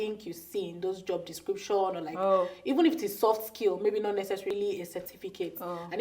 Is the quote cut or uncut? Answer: cut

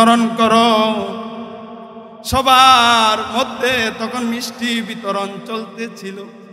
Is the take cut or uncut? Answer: uncut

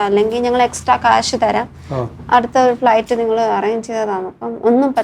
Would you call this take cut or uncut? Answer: uncut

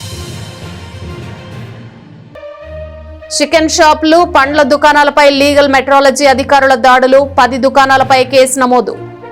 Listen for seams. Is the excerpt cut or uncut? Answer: cut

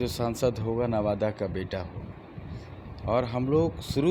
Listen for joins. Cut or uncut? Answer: uncut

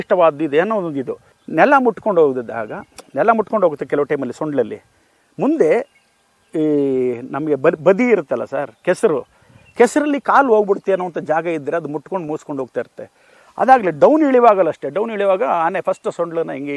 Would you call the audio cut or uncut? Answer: uncut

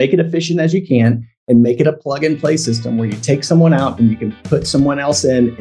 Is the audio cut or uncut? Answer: uncut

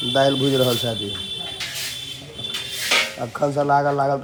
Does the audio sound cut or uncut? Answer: uncut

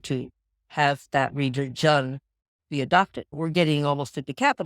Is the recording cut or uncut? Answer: cut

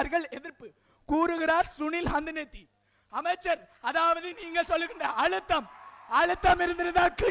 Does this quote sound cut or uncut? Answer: uncut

